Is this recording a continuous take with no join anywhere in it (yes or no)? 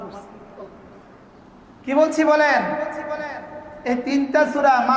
no